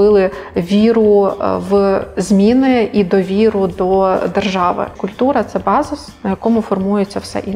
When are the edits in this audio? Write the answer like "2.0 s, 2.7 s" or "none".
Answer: 5.0 s